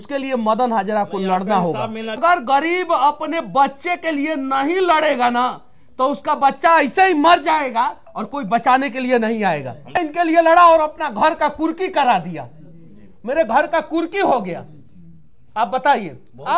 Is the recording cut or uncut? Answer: cut